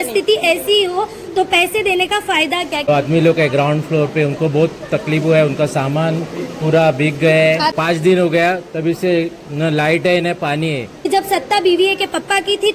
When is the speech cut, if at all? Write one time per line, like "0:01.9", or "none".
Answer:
0:02.9
0:07.7
0:11.1